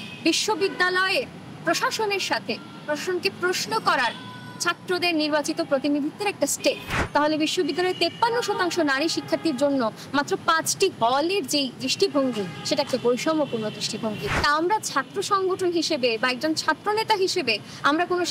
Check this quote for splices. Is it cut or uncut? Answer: cut